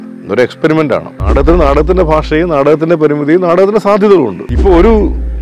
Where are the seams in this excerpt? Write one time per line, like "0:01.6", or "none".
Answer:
0:01.2
0:04.5

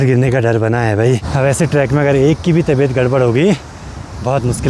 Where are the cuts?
0:01.3

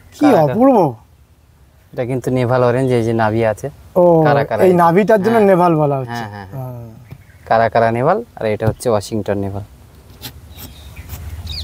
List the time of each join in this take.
none

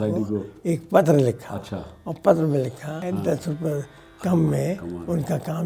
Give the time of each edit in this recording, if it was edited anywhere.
0:03.0

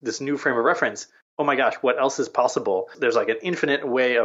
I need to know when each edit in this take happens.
0:03.0

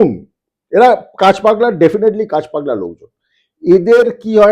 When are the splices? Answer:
none

